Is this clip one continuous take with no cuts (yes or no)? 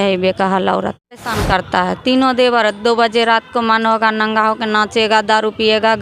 no